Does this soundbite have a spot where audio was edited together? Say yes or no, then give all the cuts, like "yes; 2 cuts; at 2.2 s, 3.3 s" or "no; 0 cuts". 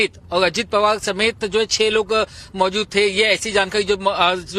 no; 0 cuts